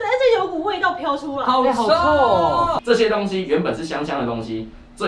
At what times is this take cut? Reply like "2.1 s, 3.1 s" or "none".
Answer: 2.8 s